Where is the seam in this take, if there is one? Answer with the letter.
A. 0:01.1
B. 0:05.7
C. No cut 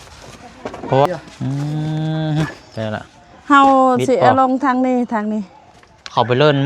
A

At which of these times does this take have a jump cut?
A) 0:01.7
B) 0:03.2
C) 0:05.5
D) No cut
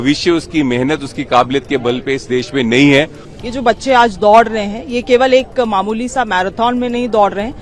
B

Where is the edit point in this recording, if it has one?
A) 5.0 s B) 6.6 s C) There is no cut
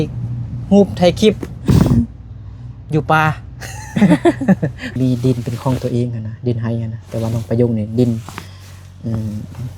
A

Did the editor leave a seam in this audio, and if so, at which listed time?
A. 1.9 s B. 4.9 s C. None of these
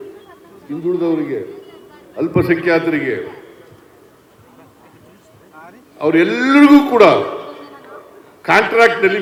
C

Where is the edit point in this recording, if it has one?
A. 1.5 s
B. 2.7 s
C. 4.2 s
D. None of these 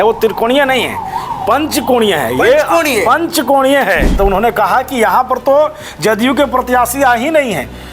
C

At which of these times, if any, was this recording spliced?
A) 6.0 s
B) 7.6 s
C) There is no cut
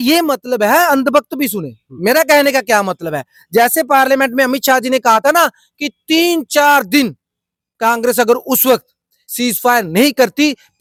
C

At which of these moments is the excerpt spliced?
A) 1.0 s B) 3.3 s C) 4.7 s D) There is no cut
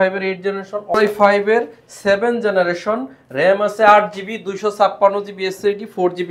A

